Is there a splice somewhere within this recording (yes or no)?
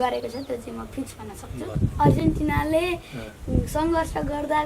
yes